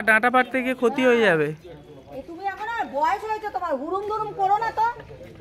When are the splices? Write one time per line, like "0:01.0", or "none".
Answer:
none